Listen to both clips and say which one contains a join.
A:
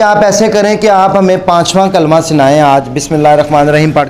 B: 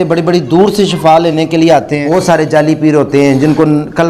B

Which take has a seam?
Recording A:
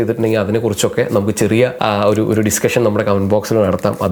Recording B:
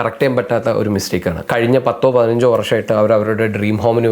B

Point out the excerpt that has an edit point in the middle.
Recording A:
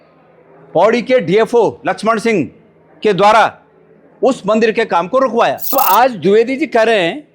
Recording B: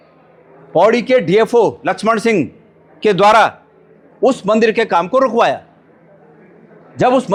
A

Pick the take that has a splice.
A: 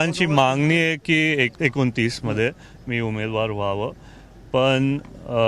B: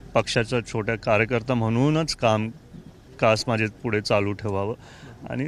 A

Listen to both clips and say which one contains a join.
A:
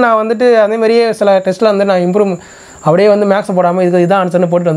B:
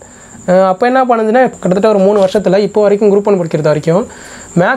B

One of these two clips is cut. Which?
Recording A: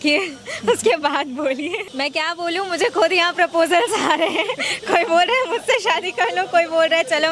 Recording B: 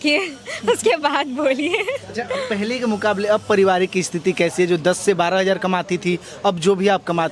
A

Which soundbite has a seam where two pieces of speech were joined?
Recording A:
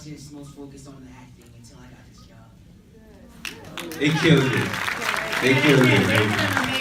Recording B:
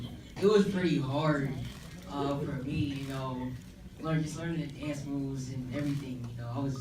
B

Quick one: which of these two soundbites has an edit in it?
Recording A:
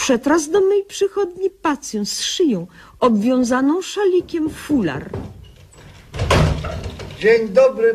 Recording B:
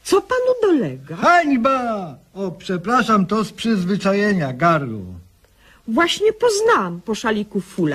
B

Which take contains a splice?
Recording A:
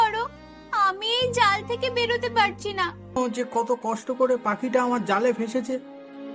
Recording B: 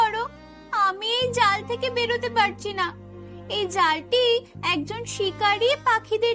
A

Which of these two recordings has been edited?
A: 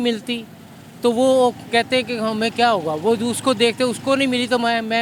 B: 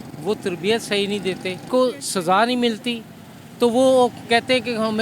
B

